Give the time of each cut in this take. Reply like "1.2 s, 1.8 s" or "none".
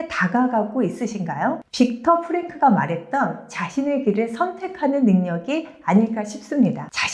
1.6 s